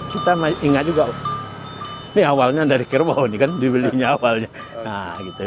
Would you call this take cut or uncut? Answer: uncut